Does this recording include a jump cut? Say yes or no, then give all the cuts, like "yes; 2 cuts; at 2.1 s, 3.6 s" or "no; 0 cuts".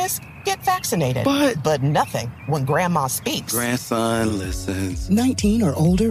no; 0 cuts